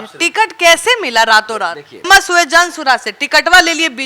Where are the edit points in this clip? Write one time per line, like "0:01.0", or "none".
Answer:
0:02.1